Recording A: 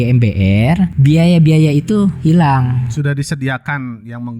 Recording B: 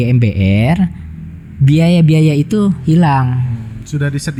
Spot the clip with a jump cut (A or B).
A